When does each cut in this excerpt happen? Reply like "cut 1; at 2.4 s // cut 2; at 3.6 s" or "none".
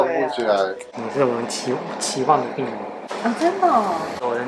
cut 1; at 1.0 s